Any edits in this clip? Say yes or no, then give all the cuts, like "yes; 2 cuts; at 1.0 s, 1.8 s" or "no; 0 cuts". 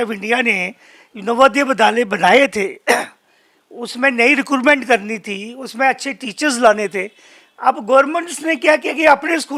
no; 0 cuts